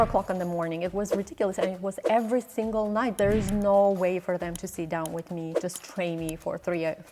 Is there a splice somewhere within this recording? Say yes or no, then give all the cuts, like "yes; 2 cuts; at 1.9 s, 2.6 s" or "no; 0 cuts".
yes; 2 cuts; at 3.1 s, 5.5 s